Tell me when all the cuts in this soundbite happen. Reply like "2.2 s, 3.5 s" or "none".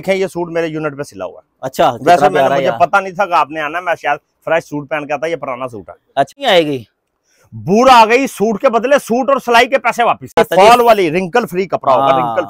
6.3 s, 10.4 s